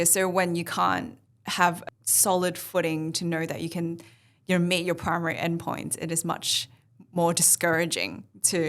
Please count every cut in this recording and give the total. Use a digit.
1